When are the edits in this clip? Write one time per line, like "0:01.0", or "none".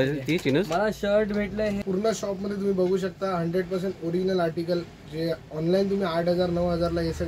0:01.8